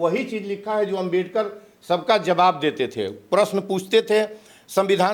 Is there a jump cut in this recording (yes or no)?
no